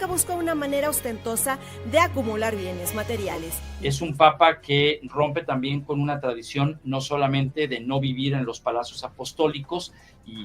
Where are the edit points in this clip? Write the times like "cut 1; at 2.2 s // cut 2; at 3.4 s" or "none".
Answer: cut 1; at 3.6 s